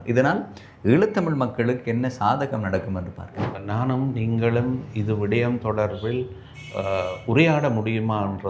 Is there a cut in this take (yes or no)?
yes